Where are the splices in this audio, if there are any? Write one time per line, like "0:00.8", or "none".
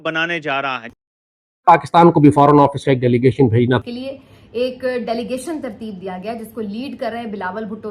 0:00.9
0:03.8